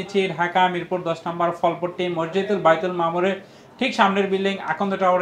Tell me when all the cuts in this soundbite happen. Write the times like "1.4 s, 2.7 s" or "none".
none